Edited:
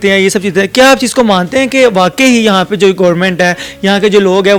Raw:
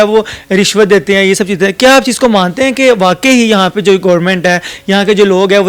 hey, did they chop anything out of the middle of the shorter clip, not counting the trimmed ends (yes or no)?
no